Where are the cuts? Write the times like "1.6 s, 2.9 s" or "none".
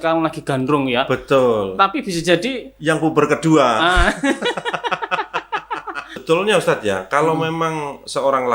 6.2 s